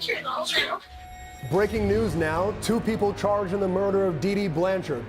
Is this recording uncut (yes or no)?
no